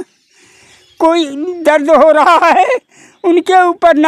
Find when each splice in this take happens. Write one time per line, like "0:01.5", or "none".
none